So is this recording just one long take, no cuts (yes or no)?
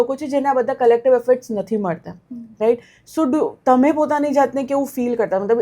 yes